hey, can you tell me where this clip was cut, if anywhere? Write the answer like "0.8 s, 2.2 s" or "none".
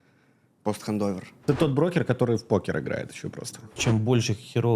1.3 s, 3.8 s